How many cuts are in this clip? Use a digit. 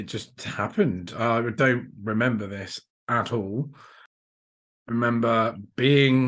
1